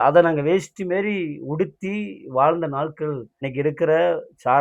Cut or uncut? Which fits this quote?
cut